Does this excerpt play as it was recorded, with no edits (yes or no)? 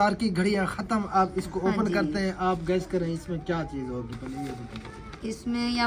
yes